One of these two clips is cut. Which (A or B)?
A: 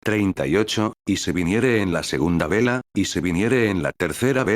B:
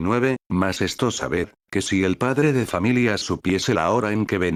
A